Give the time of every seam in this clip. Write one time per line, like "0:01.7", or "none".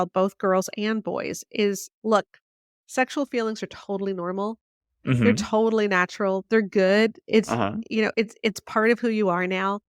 0:01.9

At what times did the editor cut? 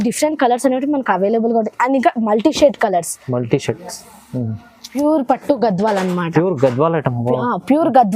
0:04.8

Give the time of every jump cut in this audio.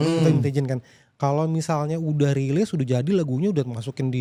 none

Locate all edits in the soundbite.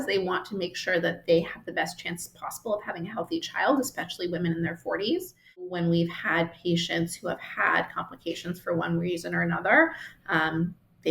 0:05.7

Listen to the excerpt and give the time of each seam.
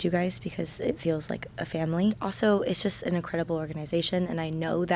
0:02.3

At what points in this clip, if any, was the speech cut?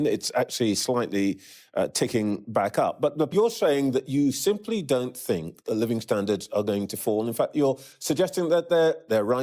0:03.3

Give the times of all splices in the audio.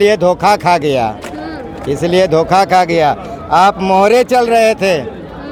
none

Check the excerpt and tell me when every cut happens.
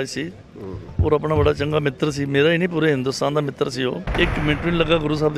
0:04.0

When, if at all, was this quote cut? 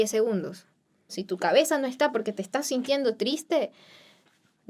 0:01.2

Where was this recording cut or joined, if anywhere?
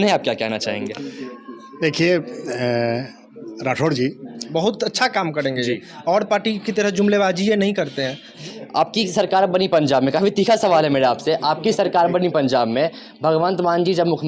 0:04.4
0:08.4

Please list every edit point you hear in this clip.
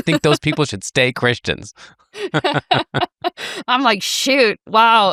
none

